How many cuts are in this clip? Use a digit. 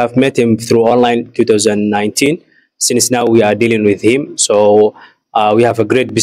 0